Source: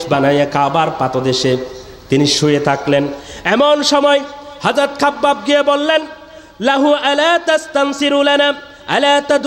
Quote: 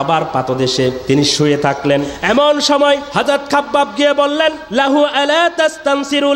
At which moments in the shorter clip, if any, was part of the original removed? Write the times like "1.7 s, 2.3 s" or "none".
1.0 s, 2.1 s, 3.1 s, 4.6 s